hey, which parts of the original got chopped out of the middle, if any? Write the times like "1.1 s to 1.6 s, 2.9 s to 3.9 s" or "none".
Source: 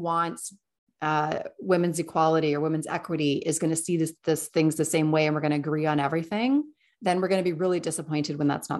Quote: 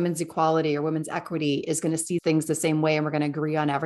4.0 s to 4.5 s